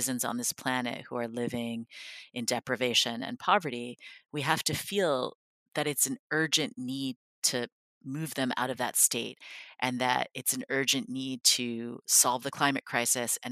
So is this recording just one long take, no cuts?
no; 1 cut; at 12.5 s

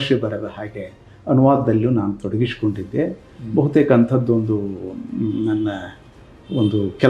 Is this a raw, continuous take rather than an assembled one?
yes; 0 cuts

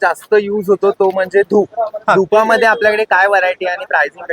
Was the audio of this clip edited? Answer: no; 0 cuts

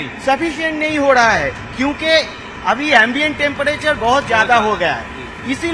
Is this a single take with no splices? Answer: yes; 0 cuts

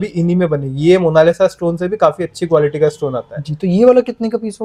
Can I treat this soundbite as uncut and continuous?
yes; 0 cuts

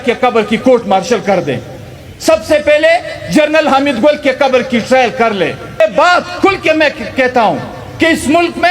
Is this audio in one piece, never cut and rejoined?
no; 1 cut; at 5.8 s

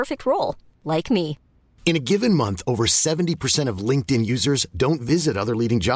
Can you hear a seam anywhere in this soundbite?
no; 0 cuts

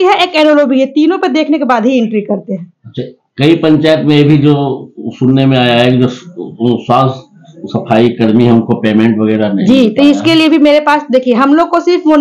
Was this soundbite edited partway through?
no; 0 cuts

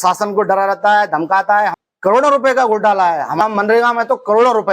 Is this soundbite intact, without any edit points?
no; 2 cuts; at 1.8 s, 3.4 s

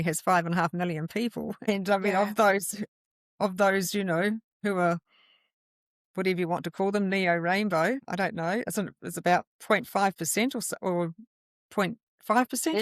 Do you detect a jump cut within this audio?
yes; 3 cuts; at 1.6 s, 4.5 s, 8.1 s

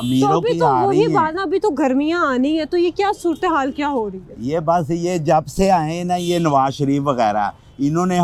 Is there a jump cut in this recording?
no; 0 cuts

